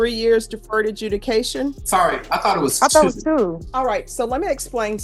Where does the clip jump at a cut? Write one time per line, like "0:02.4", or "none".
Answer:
0:01.8
0:03.6